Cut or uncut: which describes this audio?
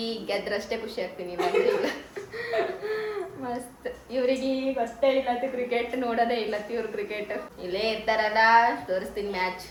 uncut